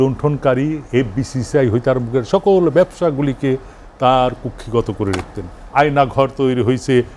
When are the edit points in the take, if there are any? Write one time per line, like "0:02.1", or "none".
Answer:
0:05.6